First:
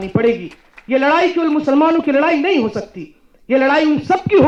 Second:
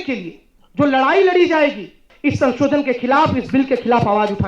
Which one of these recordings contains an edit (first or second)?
second